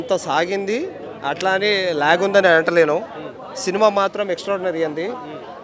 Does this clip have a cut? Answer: no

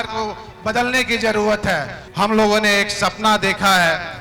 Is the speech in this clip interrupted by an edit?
yes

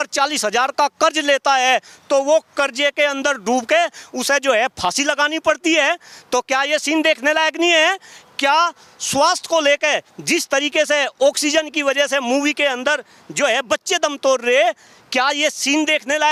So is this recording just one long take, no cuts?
yes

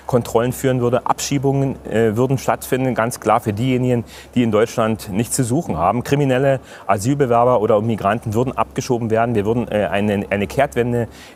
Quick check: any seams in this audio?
no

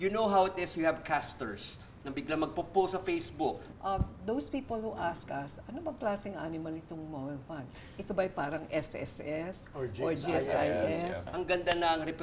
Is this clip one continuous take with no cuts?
no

